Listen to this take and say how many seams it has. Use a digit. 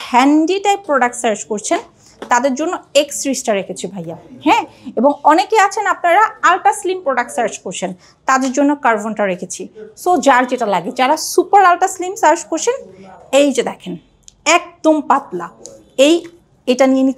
0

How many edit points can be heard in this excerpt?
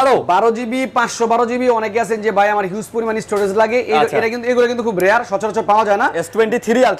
0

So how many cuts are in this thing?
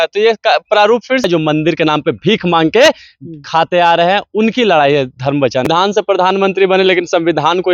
2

